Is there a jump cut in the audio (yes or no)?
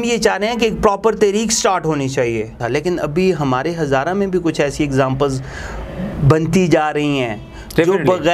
yes